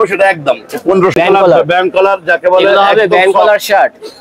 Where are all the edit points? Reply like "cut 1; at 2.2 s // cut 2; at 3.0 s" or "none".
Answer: cut 1; at 1.1 s